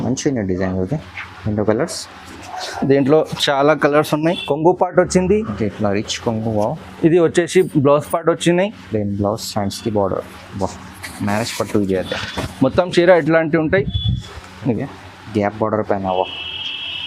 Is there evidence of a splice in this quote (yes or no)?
yes